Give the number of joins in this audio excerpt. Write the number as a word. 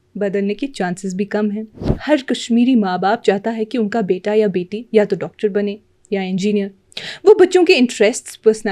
one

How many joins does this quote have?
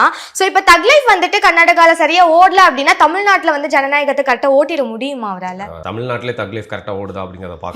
zero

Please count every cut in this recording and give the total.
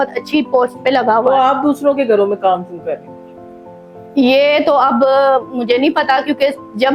zero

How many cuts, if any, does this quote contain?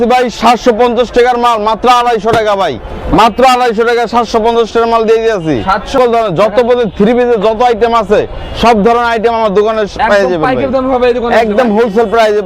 one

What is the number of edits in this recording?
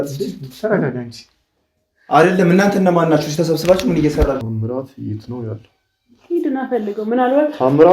one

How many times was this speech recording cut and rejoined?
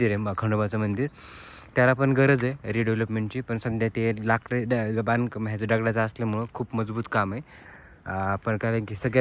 zero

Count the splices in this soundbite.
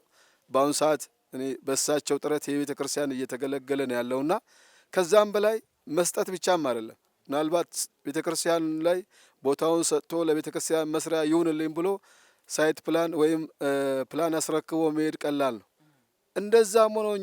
zero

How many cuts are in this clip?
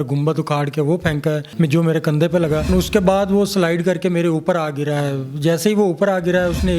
two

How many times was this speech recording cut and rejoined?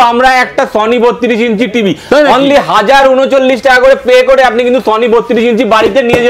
zero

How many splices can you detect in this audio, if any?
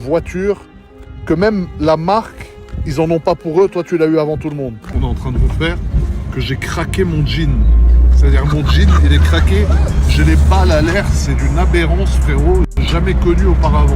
one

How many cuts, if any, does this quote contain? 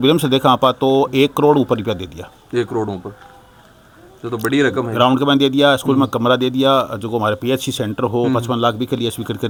zero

